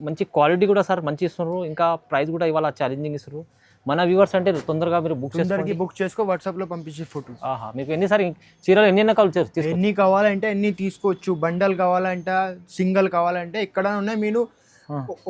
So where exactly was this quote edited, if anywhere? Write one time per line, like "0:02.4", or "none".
none